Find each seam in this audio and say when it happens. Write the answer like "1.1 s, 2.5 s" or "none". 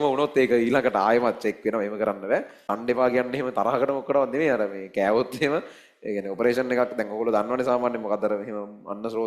2.7 s